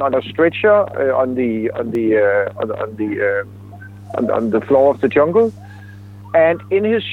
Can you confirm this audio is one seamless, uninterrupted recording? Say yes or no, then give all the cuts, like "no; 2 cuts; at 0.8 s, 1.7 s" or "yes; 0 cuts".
yes; 0 cuts